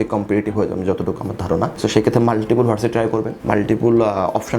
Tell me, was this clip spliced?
no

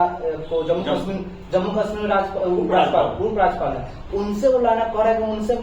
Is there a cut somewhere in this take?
no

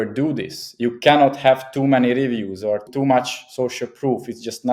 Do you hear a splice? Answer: yes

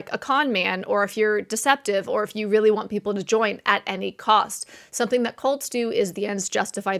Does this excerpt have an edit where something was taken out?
no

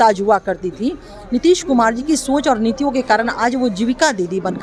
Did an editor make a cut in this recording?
no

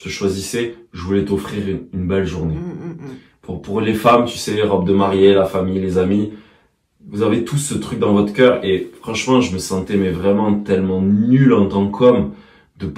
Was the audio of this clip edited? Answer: no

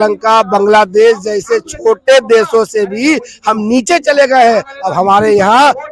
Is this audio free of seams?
yes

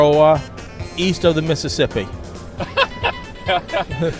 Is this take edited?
yes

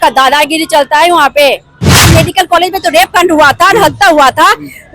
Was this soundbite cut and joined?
yes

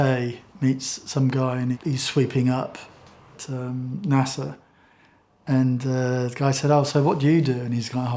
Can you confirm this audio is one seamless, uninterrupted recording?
no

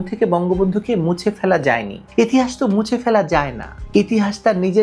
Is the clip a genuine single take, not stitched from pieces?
no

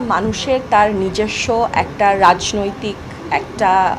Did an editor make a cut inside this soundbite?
no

